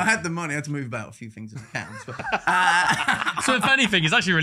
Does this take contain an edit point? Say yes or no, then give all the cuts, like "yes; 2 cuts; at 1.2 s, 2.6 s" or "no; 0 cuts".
no; 0 cuts